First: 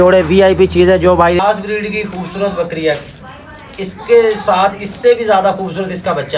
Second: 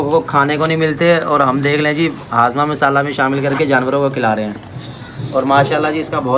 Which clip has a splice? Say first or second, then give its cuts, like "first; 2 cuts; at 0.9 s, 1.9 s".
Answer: first; 1 cut; at 1.4 s